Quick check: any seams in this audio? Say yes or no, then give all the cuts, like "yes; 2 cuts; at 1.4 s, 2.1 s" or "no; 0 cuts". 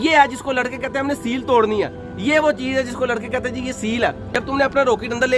yes; 1 cut; at 4.2 s